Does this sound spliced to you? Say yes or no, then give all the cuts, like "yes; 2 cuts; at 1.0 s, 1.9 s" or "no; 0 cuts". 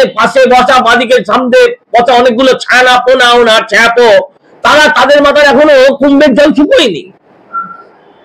no; 0 cuts